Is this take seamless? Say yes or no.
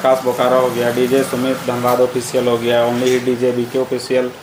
yes